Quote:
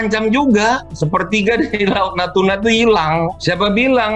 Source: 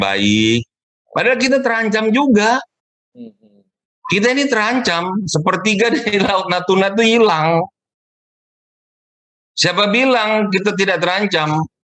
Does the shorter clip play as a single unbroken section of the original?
no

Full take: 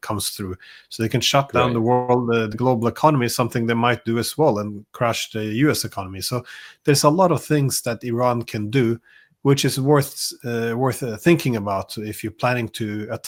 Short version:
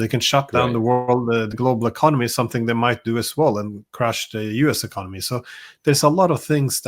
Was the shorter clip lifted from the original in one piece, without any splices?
yes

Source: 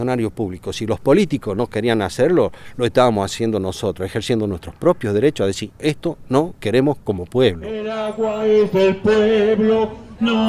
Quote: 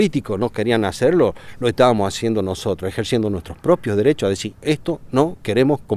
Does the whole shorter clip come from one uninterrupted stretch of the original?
yes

